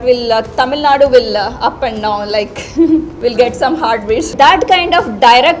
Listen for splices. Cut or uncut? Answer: cut